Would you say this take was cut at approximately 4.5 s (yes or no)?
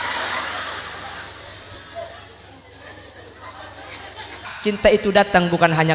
yes